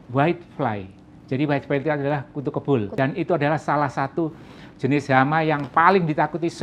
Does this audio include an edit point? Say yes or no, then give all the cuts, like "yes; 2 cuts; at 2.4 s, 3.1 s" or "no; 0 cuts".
yes; 1 cut; at 2.9 s